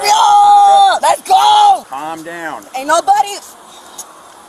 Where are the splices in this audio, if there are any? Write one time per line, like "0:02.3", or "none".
0:01.0
0:02.0